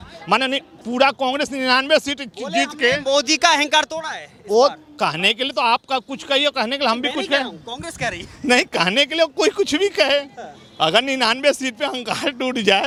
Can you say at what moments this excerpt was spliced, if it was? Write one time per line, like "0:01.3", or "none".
none